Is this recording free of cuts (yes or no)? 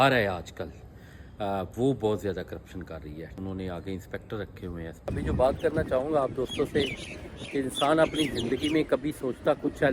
no